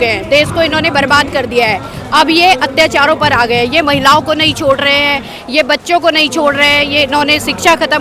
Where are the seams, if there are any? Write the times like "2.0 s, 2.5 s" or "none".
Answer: none